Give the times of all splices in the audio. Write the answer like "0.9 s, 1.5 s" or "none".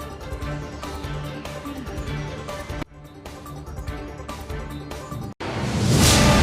1.0 s